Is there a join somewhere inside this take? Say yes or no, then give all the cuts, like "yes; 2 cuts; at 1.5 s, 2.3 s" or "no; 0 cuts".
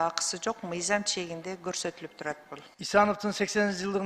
no; 0 cuts